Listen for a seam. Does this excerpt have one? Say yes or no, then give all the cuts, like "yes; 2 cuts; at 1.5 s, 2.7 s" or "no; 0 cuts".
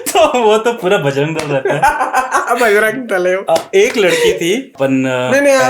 yes; 1 cut; at 4.7 s